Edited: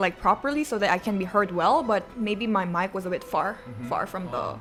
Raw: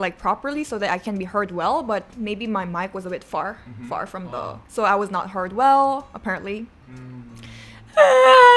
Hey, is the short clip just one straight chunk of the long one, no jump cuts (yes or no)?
yes